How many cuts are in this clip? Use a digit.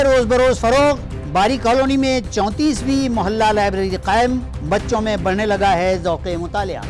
0